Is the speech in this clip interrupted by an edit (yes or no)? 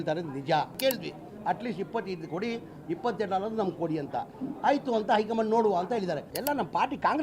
yes